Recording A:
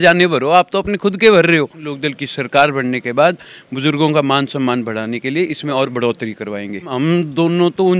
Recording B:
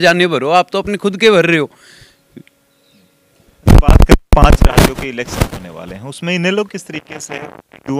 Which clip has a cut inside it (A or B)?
A